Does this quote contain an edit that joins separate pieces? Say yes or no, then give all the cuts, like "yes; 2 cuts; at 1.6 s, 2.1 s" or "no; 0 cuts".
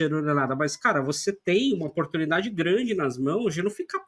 no; 0 cuts